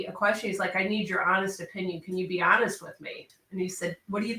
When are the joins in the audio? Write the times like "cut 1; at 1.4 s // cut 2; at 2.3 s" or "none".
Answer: cut 1; at 3.3 s